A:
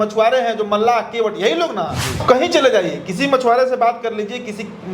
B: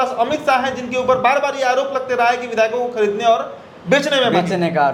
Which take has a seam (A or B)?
A